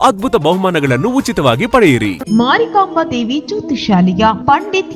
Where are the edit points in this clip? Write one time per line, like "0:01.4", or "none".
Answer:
0:02.2